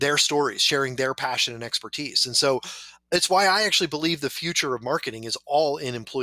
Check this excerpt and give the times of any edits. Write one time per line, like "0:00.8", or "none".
none